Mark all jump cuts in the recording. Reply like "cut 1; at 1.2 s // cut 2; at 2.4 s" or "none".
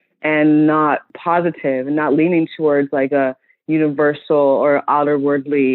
none